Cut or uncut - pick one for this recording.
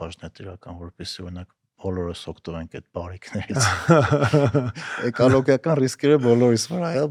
uncut